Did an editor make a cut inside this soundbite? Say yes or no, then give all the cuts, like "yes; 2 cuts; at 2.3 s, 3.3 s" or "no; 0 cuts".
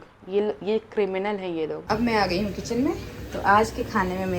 yes; 1 cut; at 1.8 s